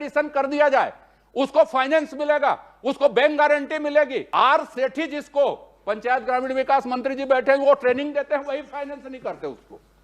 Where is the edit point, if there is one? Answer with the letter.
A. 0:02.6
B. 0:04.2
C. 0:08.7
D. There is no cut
B